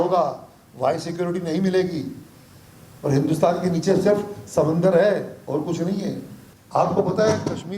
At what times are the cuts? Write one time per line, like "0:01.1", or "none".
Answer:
0:06.4